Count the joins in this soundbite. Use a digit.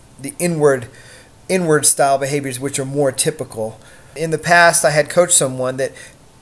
1